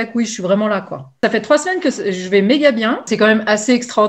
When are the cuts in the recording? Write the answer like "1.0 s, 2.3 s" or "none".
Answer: 1.2 s, 3.1 s

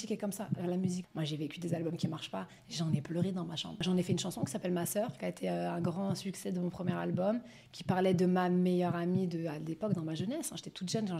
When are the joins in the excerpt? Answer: 1.1 s, 3.8 s

